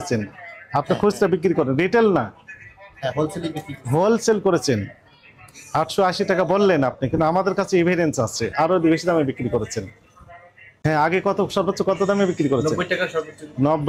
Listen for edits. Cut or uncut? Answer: uncut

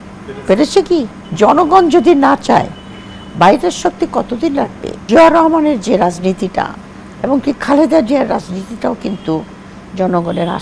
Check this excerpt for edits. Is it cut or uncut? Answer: cut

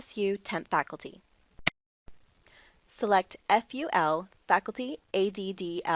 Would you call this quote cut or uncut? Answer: cut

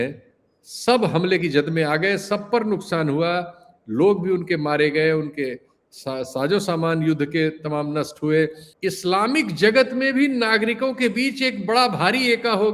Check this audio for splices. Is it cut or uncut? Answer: cut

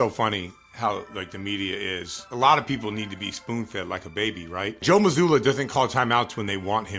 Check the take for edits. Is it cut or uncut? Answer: cut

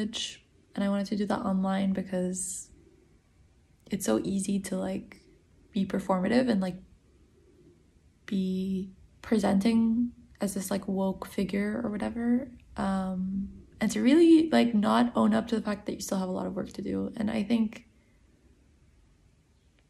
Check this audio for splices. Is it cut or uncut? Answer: uncut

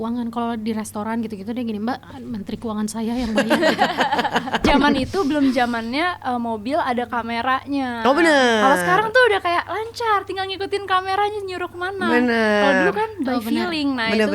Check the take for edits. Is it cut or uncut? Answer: cut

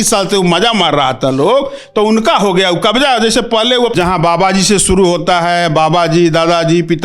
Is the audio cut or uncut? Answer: cut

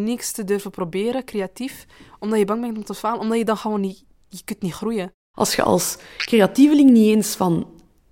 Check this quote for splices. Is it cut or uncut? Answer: cut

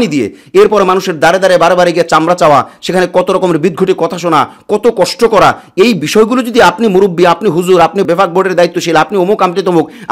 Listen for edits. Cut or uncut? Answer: uncut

